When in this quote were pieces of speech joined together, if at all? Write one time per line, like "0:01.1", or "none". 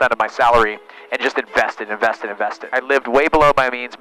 0:02.7